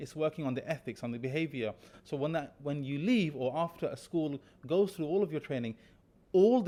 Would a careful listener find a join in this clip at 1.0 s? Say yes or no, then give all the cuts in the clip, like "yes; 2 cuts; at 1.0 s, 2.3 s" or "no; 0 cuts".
no; 0 cuts